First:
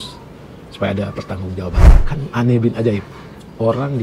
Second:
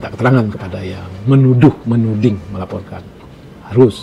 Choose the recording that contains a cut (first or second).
first